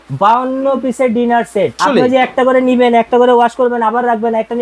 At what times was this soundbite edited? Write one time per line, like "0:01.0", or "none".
0:01.8

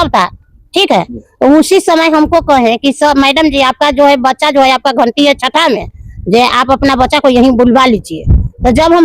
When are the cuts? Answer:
none

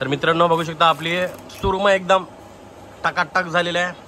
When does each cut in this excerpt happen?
none

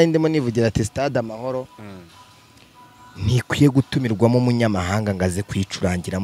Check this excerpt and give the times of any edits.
none

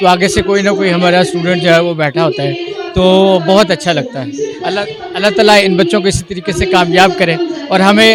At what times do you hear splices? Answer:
none

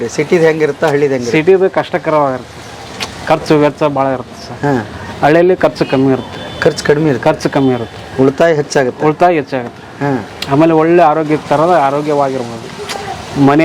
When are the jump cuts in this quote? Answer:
none

